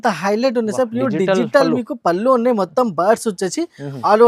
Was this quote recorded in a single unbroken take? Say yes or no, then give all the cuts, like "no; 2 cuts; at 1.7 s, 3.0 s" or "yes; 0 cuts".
yes; 0 cuts